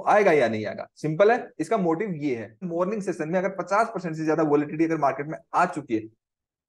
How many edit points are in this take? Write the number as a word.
one